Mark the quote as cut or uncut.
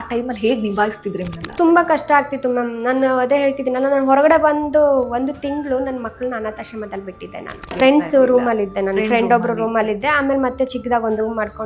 cut